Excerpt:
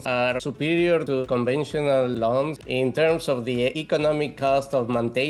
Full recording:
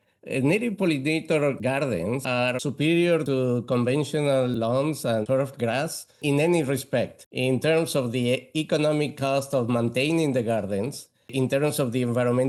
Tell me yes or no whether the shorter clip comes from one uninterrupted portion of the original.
no